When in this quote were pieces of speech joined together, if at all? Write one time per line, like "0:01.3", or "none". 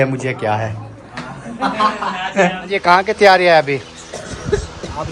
0:02.6